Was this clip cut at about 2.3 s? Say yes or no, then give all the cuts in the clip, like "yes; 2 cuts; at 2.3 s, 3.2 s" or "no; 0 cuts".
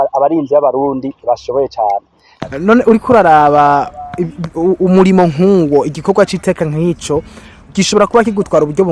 yes; 1 cut; at 2.3 s